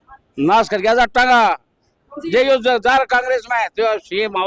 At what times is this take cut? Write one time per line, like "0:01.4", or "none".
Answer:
none

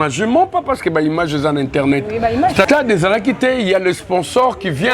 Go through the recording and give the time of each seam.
0:02.7

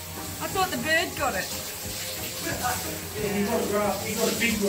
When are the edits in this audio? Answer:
none

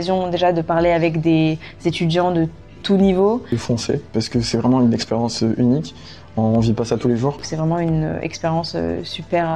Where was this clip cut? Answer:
0:03.6
0:07.5

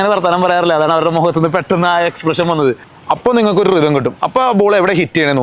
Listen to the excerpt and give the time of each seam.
0:02.9

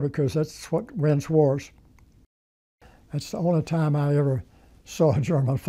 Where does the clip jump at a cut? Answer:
0:02.2

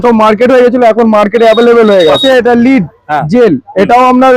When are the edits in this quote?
0:02.2

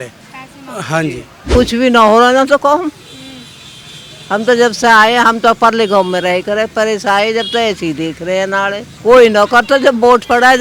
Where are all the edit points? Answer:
0:01.3
0:08.9

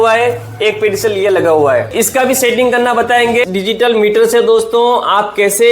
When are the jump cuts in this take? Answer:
0:01.9
0:03.4

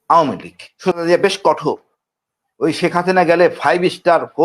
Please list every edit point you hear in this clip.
0:00.9

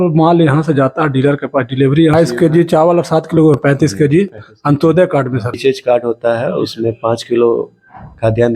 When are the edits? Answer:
0:02.1
0:05.6

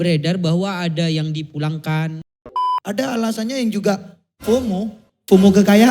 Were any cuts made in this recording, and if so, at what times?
0:02.5

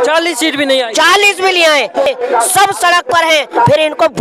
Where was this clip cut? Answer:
0:02.1

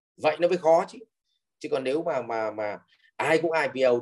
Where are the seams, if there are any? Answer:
none

